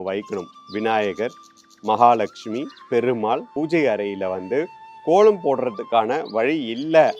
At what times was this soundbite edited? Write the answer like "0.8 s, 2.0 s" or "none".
3.5 s